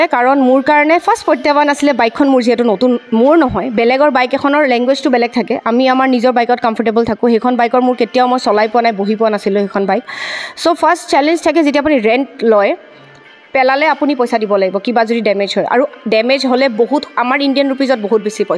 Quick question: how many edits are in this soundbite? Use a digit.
0